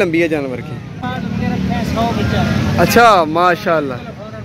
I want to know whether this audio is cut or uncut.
cut